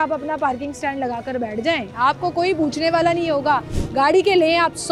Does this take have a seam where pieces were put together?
no; 0 cuts

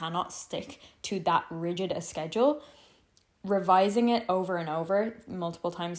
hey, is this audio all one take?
yes; 0 cuts

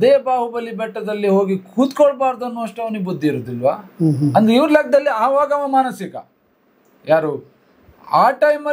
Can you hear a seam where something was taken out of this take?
no; 0 cuts

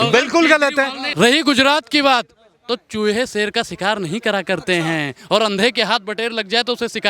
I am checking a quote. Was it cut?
yes; 1 cut; at 1.0 s

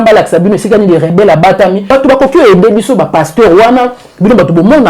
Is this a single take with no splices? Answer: no; 1 cut; at 1.8 s

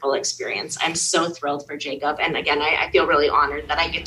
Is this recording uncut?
yes; 0 cuts

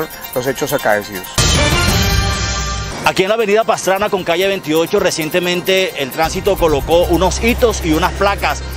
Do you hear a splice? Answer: yes; 2 cuts; at 1.3 s, 2.8 s

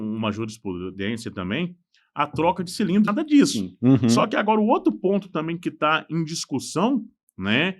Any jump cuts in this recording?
yes; 1 cut; at 3.1 s

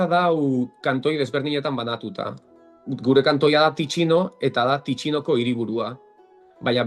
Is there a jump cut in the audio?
no; 0 cuts

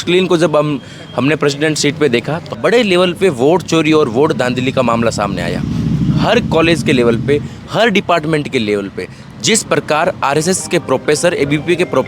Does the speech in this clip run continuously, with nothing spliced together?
no; 1 cut; at 2.5 s

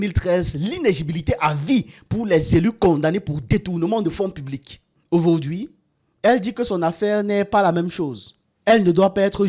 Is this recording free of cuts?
yes; 0 cuts

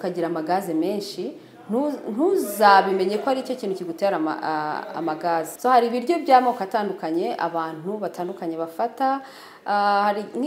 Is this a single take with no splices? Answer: no; 1 cut; at 5.5 s

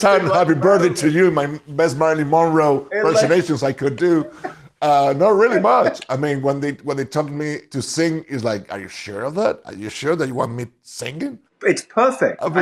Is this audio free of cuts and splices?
yes; 0 cuts

